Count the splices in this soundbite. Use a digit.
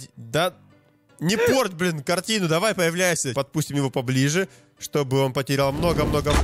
1